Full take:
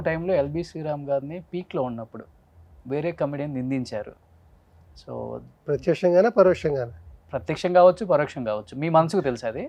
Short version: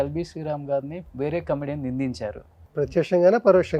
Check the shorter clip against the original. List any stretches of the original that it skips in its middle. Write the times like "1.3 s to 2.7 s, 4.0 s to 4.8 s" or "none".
1.4 s to 2.7 s, 4.3 s to 5.5 s